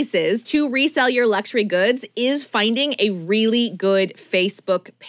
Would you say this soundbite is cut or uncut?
uncut